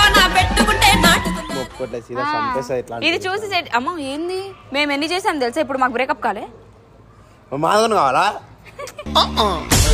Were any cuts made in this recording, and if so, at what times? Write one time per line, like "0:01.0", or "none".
0:01.5